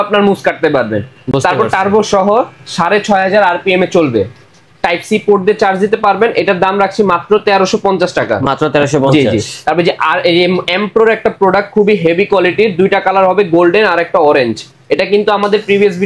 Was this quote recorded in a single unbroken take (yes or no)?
yes